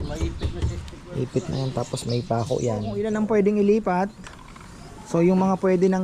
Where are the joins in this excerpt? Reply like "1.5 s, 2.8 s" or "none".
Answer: 2.9 s